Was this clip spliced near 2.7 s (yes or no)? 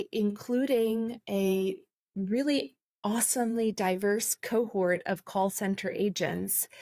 no